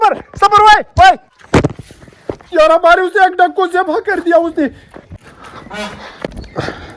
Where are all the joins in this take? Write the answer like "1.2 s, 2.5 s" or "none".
1.3 s

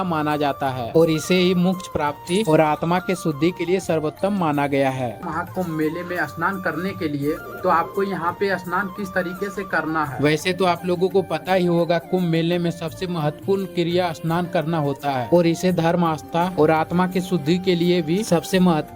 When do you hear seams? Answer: 5.2 s

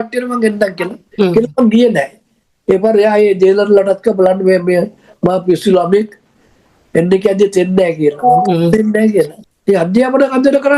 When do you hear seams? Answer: 9.5 s

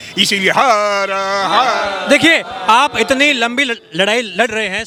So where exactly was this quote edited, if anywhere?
none

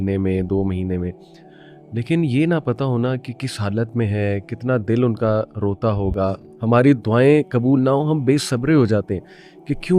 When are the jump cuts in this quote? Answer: 6.5 s

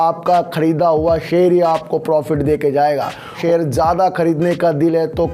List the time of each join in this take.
3.4 s

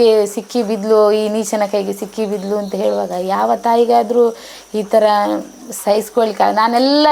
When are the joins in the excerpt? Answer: none

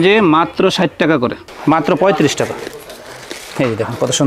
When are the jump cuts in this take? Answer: 1.4 s

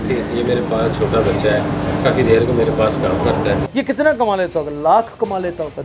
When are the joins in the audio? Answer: 3.7 s

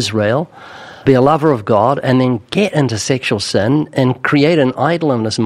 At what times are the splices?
1.0 s

